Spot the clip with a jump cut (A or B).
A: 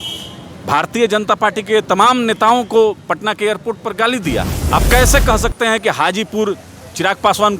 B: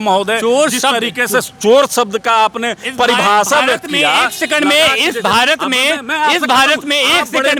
A